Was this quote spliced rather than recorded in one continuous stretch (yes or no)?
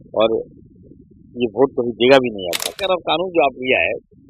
yes